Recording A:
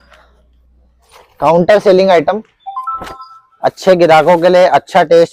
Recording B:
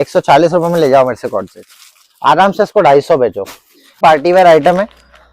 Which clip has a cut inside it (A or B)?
B